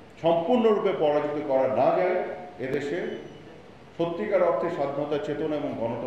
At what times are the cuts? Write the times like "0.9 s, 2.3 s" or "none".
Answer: none